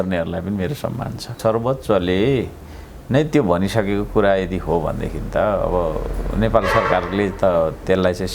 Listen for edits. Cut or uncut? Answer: cut